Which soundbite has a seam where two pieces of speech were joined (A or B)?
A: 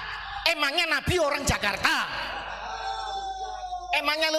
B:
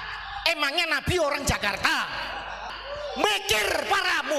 B